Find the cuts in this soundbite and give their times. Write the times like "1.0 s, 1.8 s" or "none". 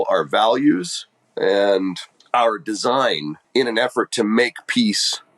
2.1 s, 3.3 s